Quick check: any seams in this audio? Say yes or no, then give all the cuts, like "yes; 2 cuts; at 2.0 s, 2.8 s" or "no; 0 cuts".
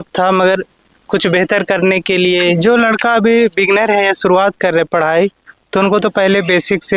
yes; 1 cut; at 2.6 s